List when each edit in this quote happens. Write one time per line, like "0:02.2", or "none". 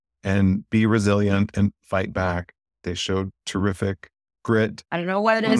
0:02.8
0:04.8

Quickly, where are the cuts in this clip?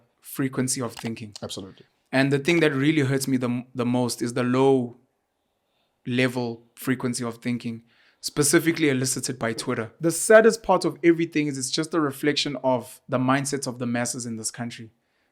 0:09.9

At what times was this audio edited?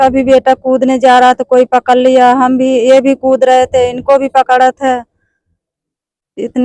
none

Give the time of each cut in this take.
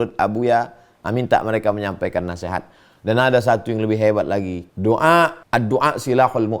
0:04.6
0:05.4

